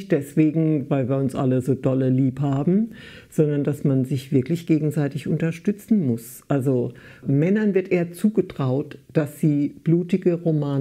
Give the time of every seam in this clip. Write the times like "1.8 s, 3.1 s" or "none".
none